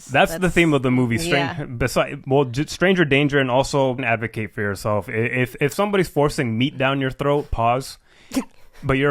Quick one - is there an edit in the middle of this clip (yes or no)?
yes